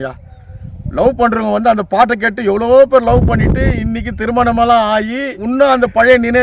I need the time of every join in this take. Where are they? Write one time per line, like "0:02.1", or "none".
0:05.4